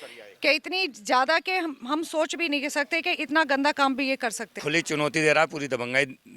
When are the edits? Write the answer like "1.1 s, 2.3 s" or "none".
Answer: 4.5 s